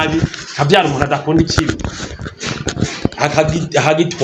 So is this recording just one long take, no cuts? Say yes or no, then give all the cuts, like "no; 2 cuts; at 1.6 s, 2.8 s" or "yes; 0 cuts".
yes; 0 cuts